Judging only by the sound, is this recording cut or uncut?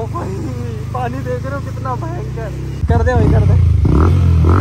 cut